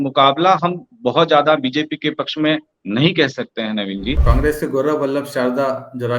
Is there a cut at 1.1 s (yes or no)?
no